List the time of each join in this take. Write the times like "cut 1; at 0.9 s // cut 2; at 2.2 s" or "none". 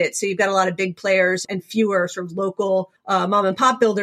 cut 1; at 1.4 s // cut 2; at 3.0 s